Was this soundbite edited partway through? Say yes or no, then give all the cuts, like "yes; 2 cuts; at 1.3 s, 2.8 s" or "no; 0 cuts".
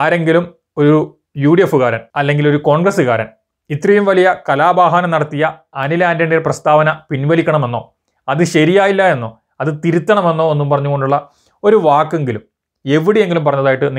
no; 0 cuts